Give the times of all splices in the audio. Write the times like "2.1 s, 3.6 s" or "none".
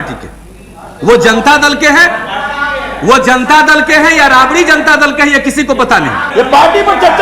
6.2 s